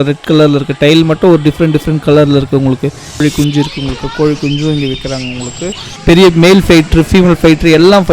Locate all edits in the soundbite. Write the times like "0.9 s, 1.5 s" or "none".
3.1 s, 5.9 s